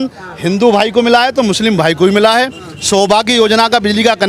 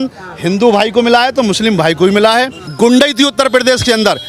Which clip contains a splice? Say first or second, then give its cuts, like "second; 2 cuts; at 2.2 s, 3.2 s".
second; 1 cut; at 2.6 s